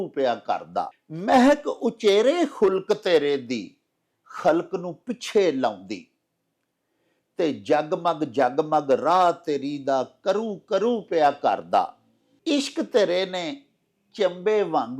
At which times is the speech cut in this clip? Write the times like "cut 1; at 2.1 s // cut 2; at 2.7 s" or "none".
cut 1; at 1.0 s